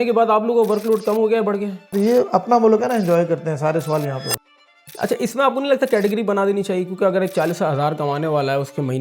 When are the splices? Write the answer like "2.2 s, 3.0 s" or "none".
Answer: 1.9 s, 4.4 s